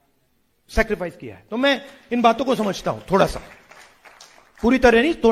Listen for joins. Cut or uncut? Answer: uncut